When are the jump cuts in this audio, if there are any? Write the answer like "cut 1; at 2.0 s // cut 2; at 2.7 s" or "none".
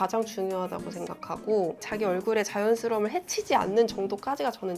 none